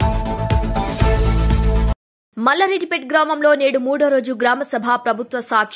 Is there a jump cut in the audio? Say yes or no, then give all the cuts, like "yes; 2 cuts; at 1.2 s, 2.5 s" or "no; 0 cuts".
no; 0 cuts